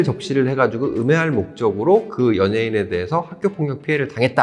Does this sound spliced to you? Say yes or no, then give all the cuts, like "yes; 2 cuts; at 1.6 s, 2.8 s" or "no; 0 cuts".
no; 0 cuts